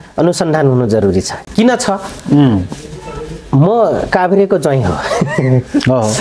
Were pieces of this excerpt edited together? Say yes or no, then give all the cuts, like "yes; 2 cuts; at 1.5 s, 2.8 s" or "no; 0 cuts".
no; 0 cuts